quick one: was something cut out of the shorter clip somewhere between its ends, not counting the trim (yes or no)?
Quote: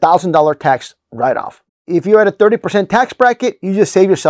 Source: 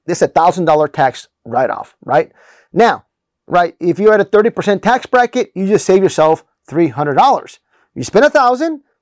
yes